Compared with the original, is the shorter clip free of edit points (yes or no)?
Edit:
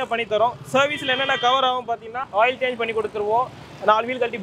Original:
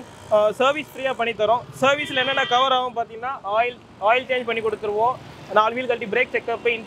no